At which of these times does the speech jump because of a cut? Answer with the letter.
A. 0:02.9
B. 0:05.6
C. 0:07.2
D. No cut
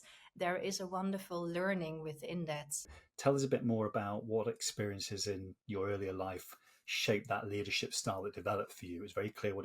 A